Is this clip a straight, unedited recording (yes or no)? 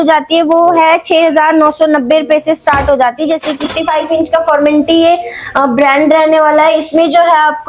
no